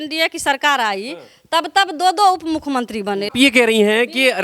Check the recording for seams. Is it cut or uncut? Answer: cut